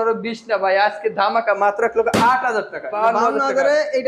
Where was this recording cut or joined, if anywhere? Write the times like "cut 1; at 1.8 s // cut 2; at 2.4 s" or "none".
cut 1; at 2.9 s